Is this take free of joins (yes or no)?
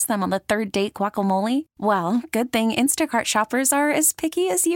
yes